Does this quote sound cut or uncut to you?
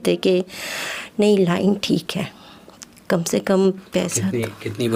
uncut